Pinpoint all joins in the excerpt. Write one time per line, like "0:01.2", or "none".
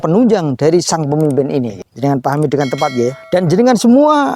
0:01.8
0:03.2